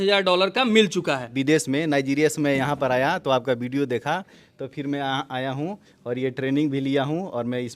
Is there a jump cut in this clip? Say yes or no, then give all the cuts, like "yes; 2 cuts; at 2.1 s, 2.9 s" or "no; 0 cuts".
yes; 1 cut; at 1.3 s